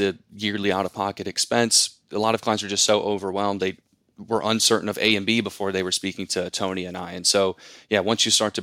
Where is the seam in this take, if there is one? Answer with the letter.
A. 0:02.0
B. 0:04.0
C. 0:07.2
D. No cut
A